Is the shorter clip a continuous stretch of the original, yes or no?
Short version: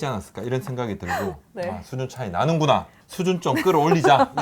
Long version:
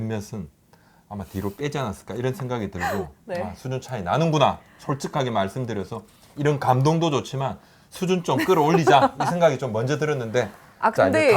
no